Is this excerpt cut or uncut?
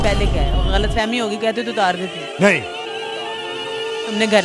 uncut